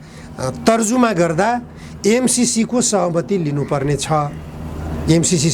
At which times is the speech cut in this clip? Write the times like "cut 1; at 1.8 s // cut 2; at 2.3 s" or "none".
none